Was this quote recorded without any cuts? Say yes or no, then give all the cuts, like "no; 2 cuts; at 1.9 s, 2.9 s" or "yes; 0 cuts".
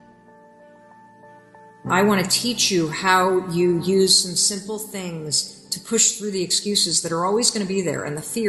no; 1 cut; at 1.8 s